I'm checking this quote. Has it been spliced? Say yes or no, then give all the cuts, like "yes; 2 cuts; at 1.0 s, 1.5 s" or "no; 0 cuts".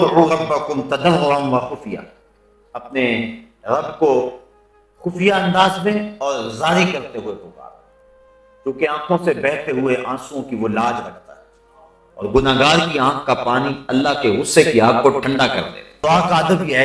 yes; 1 cut; at 15.8 s